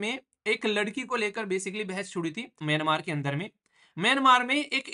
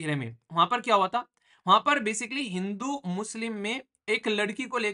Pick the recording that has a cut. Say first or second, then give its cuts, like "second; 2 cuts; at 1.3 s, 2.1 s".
first; 1 cut; at 2.5 s